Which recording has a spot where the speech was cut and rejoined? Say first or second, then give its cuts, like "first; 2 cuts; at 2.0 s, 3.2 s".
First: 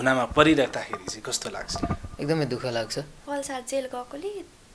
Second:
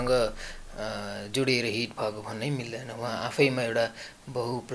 first; 1 cut; at 3.2 s